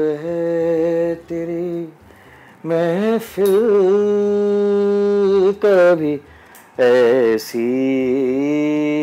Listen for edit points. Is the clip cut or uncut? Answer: uncut